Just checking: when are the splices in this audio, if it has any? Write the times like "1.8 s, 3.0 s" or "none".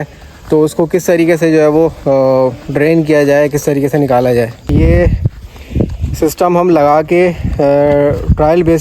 4.7 s